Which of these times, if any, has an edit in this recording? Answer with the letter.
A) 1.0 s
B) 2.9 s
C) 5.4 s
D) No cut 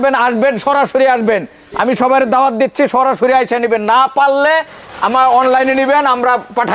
D